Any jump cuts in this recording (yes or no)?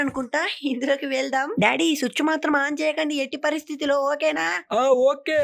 no